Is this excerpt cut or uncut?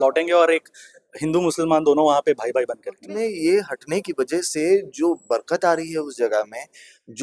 cut